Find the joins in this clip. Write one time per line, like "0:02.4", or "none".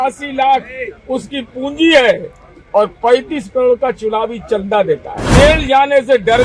0:05.2